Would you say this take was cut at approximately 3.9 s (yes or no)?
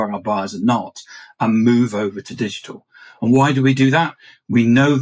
no